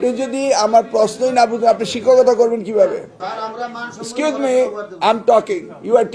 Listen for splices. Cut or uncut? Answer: cut